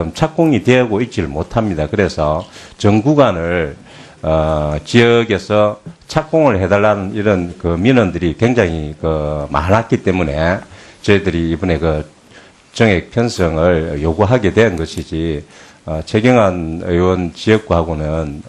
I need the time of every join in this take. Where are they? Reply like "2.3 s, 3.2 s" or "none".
none